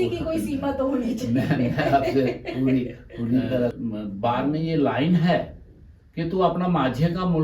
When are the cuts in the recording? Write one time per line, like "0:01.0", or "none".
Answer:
0:03.7